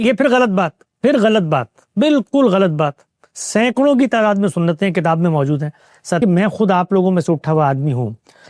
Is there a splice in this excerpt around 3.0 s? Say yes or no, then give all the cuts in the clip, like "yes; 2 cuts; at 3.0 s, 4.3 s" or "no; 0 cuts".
no; 1 cut; at 6.2 s